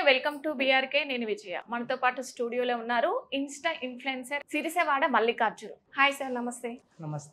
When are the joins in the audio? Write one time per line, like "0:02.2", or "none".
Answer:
0:04.4
0:05.8